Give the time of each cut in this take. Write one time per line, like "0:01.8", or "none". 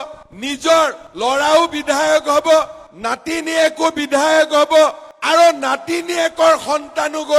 none